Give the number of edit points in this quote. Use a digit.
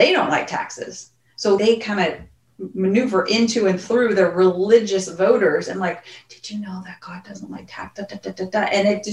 1